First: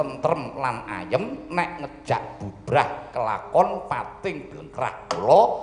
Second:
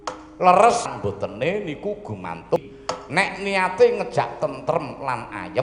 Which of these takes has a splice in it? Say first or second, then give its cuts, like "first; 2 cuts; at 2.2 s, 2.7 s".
second; 2 cuts; at 0.9 s, 2.6 s